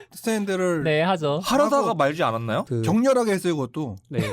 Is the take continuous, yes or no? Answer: no